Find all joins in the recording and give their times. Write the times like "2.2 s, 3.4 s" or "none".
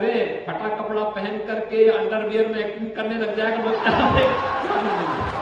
4.2 s